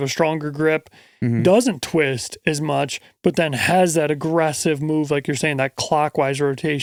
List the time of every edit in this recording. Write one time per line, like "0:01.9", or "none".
none